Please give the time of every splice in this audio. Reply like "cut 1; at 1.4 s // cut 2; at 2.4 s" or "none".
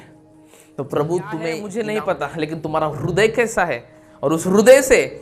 cut 1; at 1.7 s